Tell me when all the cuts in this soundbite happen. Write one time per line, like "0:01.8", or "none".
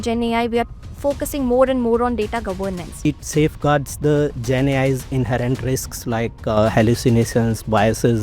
0:03.1